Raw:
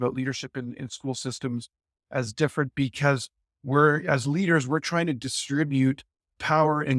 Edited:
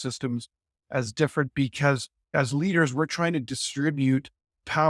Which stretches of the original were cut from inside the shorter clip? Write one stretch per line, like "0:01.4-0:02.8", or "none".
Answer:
0:03.5-0:04.0

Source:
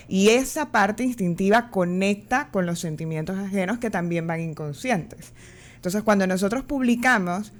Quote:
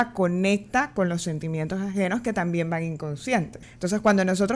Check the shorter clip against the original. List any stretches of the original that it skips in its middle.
0:05.2-0:05.6

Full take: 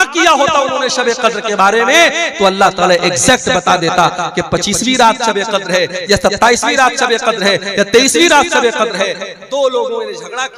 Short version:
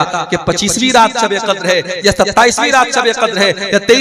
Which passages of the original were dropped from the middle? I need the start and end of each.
none

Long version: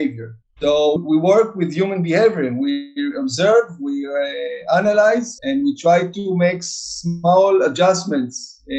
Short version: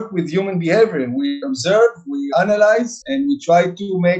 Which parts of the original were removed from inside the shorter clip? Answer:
0:02.9-0:03.2
0:04.0-0:04.6

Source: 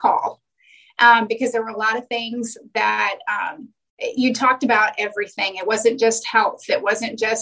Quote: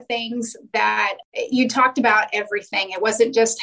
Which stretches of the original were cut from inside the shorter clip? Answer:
0:03.2-0:03.9

